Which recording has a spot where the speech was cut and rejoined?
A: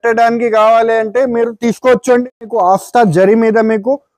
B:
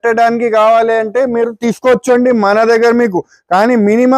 A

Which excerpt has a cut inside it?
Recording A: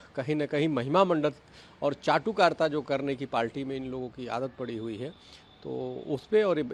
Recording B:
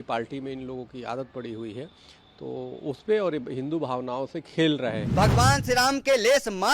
B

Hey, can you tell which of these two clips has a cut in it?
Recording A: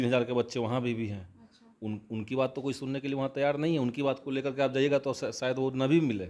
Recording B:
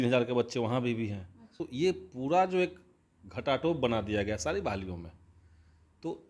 B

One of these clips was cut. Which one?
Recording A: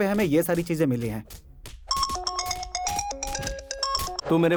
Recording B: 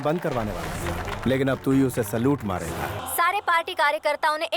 B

